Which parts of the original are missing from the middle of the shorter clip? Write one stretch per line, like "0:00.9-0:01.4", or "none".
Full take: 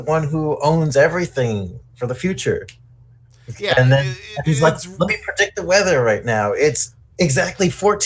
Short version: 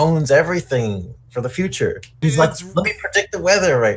0:02.7-0:04.3